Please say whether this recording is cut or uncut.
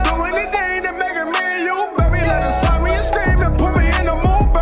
uncut